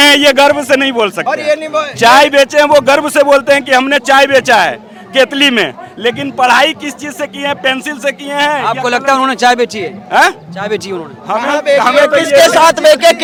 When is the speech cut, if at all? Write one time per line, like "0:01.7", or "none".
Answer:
none